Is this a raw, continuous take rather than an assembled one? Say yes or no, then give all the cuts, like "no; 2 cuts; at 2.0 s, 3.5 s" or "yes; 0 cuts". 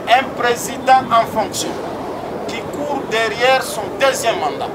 yes; 0 cuts